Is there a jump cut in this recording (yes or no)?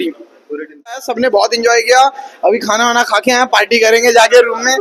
yes